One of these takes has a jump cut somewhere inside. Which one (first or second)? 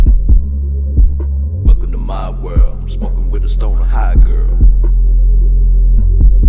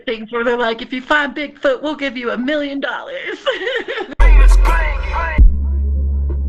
second